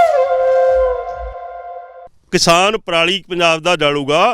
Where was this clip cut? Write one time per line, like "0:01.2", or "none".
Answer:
0:02.0